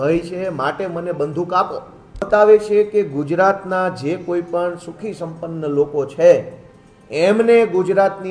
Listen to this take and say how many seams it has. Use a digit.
1